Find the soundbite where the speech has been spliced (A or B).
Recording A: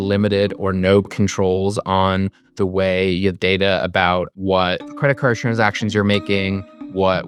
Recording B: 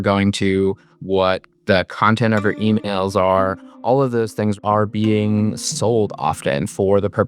B